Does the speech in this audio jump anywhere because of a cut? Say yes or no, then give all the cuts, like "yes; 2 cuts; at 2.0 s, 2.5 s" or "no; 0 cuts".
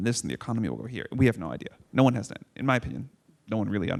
no; 0 cuts